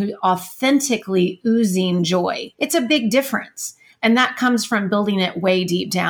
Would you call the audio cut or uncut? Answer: cut